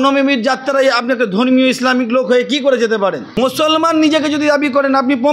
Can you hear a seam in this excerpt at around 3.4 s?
yes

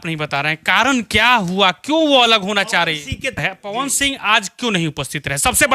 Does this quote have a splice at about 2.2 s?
no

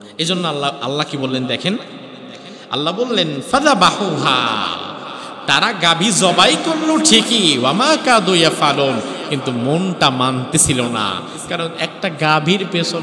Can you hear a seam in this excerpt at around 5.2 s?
no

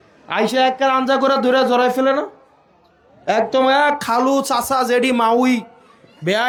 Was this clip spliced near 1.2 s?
no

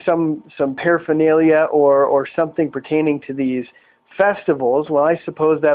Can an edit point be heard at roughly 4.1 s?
no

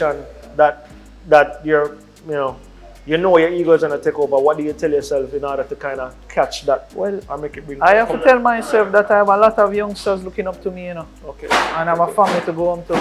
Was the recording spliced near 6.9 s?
no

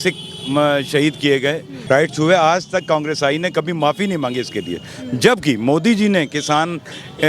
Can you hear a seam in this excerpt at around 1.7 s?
yes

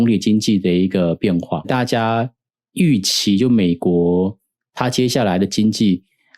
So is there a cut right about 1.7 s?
yes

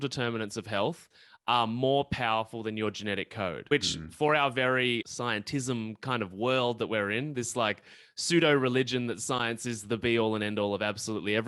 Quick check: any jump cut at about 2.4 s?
no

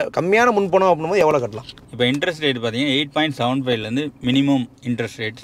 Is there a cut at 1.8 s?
yes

